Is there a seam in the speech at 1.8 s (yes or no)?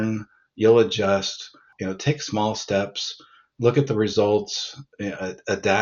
yes